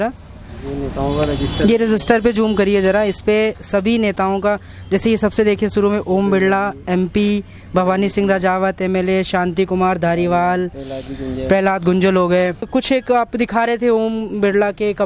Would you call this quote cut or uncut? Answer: cut